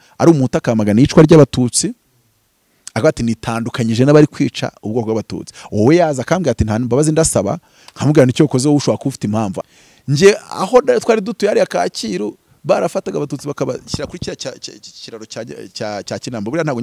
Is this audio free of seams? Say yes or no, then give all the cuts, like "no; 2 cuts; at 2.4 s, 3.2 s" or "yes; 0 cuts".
no; 1 cut; at 9.6 s